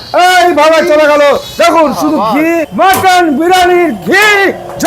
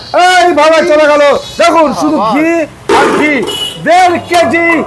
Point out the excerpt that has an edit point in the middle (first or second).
first